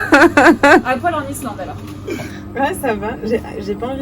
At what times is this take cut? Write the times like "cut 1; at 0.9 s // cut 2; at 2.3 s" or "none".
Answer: cut 1; at 2.4 s